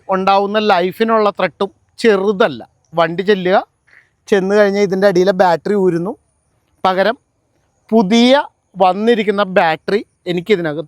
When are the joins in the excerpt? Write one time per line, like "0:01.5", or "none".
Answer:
0:02.8